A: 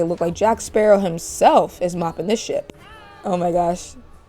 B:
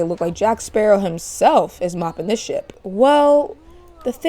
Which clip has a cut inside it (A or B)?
B